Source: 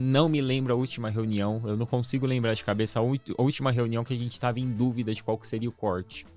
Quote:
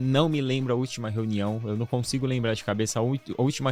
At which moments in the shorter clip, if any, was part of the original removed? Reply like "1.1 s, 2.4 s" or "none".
none